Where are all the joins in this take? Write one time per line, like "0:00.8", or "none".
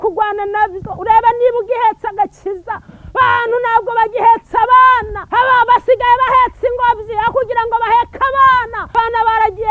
0:05.2
0:08.8